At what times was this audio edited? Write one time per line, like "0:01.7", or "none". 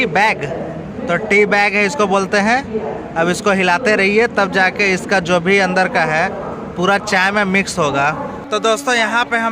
0:08.5